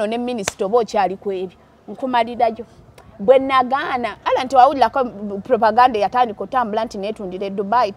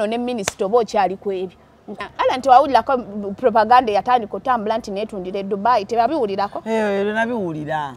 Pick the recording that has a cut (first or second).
second